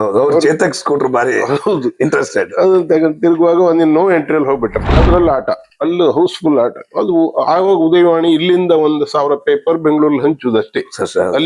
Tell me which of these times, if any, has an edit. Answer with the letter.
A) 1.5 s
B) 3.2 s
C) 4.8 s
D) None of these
C